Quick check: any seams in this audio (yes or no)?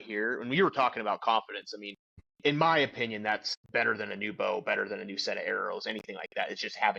yes